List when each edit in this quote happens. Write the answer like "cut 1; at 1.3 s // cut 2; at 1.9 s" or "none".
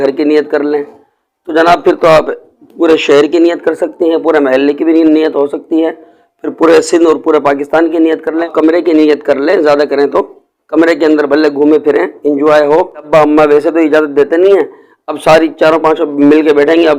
cut 1; at 8.5 s // cut 2; at 13.1 s